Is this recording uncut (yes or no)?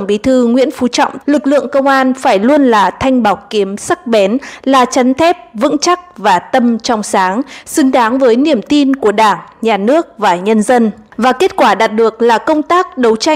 no